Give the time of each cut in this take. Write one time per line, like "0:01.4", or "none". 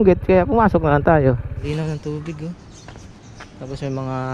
0:01.6